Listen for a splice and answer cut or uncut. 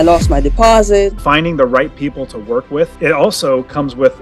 cut